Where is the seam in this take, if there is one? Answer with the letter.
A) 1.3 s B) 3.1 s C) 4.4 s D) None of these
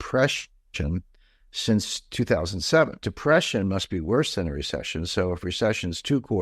B